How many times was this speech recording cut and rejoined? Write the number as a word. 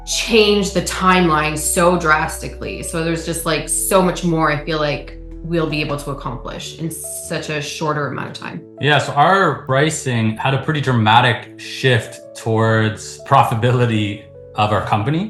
zero